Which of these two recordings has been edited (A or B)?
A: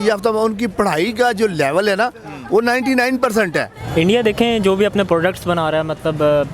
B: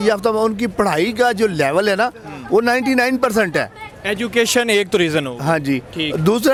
A